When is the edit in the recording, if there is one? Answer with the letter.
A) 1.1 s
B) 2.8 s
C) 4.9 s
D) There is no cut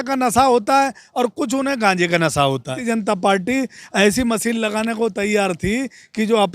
B